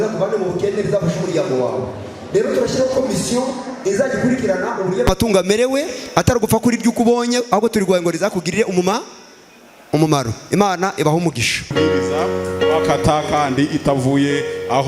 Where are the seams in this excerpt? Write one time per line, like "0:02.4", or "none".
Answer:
0:11.7